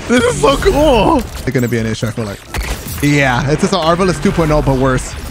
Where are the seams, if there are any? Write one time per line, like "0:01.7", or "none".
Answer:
0:01.5